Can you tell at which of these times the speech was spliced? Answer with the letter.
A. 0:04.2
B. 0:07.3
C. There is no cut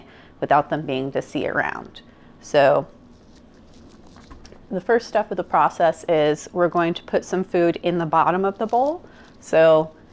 C